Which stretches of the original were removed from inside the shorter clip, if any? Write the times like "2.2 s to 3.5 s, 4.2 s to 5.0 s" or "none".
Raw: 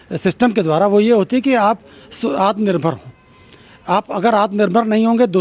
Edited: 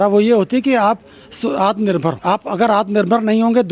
3.0 s to 3.8 s

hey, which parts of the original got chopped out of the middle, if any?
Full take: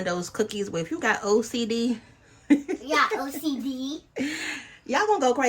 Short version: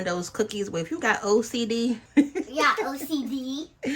2.0 s to 2.4 s

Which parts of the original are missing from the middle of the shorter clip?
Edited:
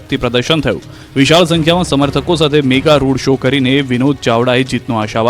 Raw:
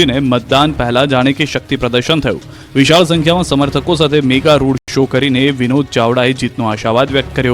4.8 s to 4.9 s

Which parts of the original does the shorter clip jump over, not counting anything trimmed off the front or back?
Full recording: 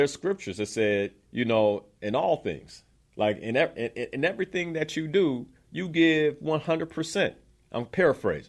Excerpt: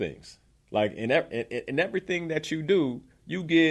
none

